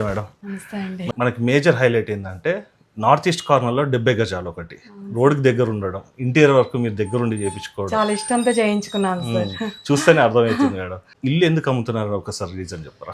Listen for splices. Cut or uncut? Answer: cut